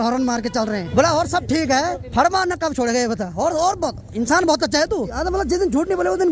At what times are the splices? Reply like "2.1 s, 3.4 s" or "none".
0.8 s, 2.0 s, 5.2 s